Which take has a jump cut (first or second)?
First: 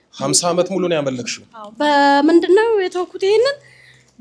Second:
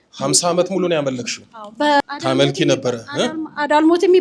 second